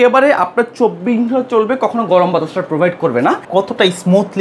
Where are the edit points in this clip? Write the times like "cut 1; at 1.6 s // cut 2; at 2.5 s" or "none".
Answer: cut 1; at 3.4 s